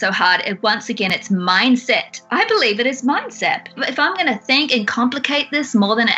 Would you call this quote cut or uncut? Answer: cut